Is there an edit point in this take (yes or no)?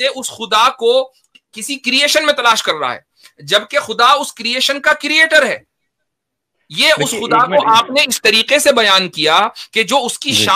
no